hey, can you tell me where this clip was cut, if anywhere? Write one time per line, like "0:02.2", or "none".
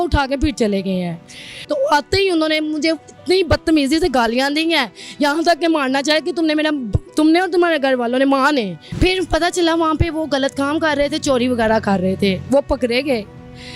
0:01.6
0:08.8